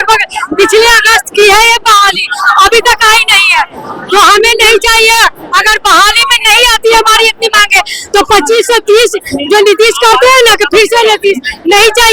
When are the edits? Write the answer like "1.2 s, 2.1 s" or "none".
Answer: none